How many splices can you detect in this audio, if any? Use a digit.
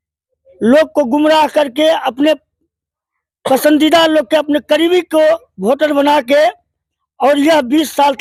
0